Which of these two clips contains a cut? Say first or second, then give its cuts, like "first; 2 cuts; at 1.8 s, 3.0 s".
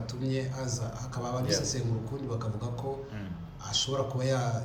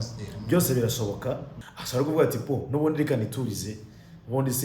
second; 1 cut; at 1.5 s